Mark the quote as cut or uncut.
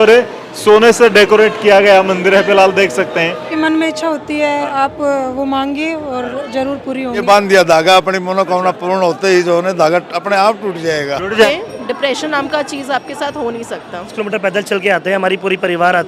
cut